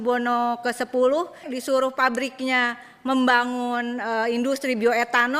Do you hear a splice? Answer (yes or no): yes